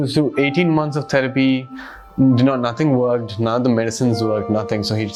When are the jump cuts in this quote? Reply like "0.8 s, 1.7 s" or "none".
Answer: none